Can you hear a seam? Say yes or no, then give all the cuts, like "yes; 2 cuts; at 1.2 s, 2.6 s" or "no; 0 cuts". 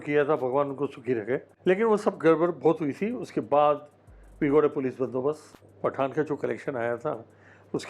yes; 2 cuts; at 1.5 s, 5.5 s